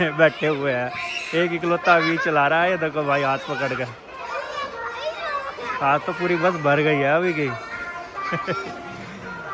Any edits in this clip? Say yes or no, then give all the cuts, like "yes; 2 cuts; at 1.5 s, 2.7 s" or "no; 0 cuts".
no; 0 cuts